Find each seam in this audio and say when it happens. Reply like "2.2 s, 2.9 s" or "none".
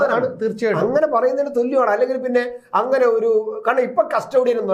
none